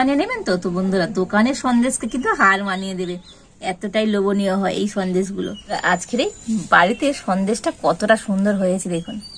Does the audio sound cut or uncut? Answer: cut